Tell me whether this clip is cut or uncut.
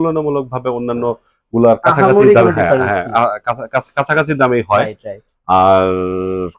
uncut